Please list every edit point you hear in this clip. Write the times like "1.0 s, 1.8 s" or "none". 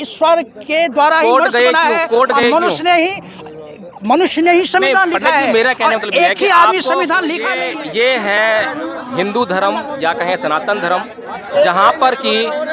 7.6 s